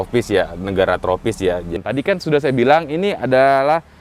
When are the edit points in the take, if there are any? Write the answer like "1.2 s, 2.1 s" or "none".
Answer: 1.8 s